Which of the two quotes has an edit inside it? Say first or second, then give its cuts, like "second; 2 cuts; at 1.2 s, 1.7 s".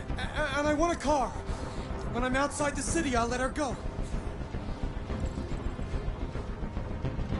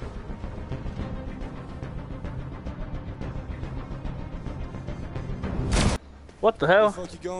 second; 1 cut; at 6.0 s